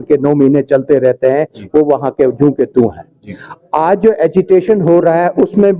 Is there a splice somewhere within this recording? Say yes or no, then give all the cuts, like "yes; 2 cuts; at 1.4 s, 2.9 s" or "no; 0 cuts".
no; 0 cuts